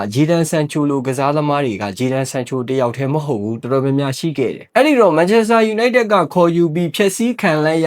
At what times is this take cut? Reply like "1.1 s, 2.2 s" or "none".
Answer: 4.6 s

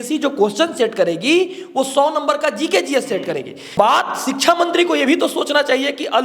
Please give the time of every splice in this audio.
3.8 s

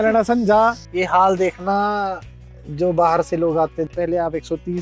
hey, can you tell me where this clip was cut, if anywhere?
0.9 s, 3.9 s

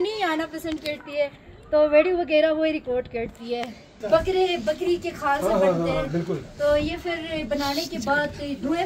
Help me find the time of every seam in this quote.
3.9 s

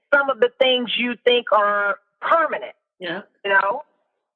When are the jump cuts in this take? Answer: none

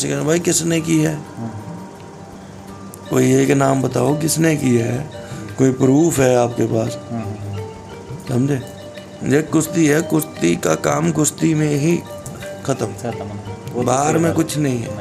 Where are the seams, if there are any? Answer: none

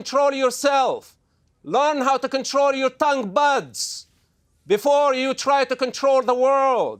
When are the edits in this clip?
none

